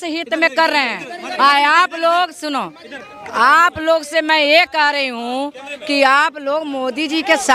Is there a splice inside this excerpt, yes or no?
no